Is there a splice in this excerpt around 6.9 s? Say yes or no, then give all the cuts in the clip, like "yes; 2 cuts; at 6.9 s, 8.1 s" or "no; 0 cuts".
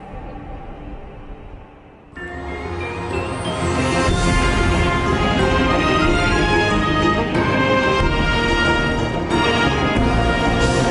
yes; 1 cut; at 6.9 s